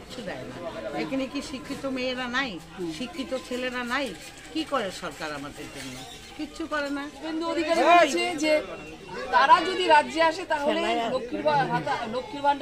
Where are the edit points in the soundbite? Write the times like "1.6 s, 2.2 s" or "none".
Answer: 7.2 s